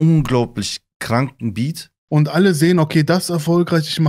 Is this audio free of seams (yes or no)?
no